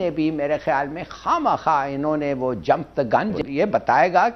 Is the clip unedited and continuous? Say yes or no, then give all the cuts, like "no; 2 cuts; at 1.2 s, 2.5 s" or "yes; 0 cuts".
no; 1 cut; at 3.4 s